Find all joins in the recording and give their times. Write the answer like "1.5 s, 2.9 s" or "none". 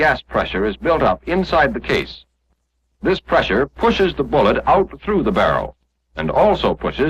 4.4 s